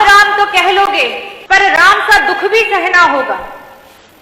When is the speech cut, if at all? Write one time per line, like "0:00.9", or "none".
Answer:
0:01.3